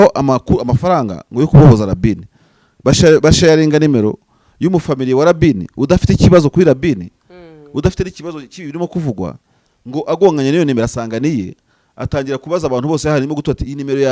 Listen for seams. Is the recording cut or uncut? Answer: uncut